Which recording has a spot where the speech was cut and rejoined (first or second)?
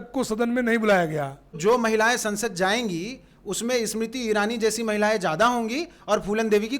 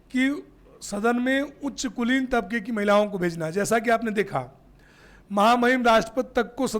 first